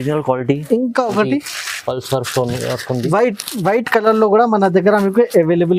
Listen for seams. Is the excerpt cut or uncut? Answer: uncut